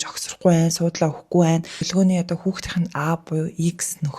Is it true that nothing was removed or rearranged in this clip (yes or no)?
no